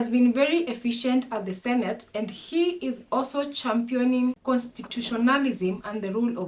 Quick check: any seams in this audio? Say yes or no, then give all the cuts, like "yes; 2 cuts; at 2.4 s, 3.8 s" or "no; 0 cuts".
yes; 1 cut; at 4.4 s